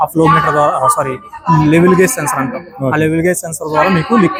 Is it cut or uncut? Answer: uncut